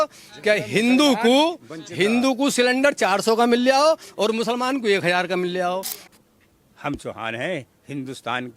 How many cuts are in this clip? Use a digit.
1